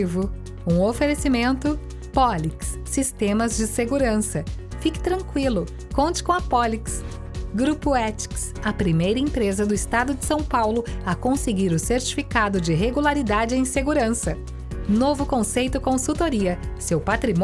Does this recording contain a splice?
no; 0 cuts

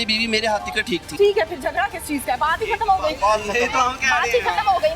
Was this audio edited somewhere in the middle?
yes; 1 cut; at 1.1 s

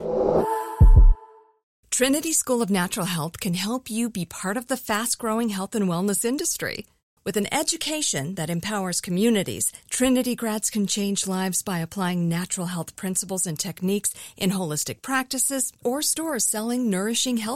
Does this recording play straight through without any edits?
no; 1 cut; at 1.3 s

